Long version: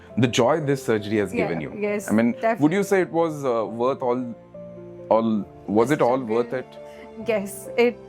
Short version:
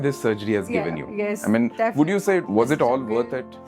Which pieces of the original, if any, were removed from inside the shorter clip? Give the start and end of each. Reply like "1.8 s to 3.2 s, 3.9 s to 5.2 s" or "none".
3.1 s to 5.6 s